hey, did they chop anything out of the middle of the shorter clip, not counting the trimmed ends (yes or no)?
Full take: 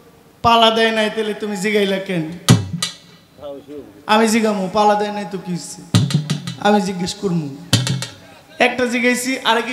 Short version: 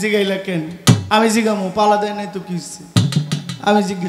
yes